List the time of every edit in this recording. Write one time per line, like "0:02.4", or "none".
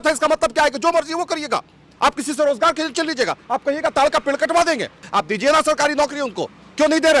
0:05.0